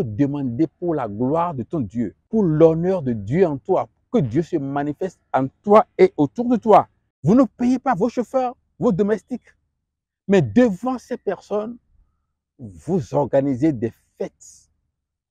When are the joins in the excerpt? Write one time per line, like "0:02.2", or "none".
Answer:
0:02.2
0:07.0